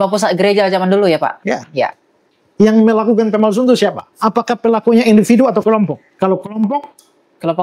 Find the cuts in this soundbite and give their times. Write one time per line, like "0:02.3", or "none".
0:02.4
0:04.1